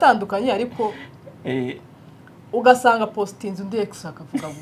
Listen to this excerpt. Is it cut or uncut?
uncut